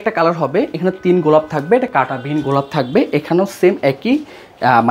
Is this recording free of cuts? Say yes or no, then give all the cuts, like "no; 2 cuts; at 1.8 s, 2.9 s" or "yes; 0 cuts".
yes; 0 cuts